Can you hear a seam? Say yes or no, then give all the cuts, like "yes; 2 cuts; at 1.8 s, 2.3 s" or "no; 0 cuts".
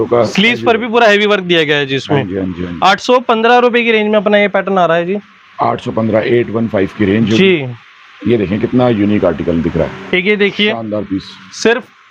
no; 0 cuts